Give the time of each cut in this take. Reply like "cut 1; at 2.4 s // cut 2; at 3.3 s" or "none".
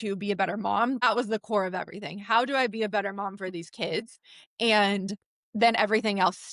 cut 1; at 1.0 s